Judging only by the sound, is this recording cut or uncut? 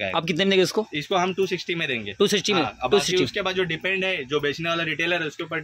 uncut